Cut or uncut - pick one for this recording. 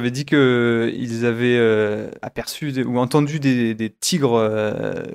uncut